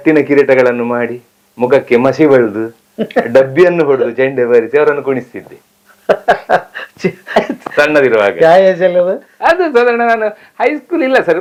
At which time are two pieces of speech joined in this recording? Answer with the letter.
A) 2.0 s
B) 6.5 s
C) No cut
C